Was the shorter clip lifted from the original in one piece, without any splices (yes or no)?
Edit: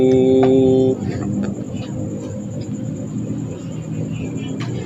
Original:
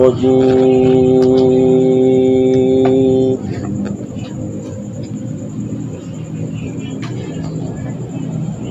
yes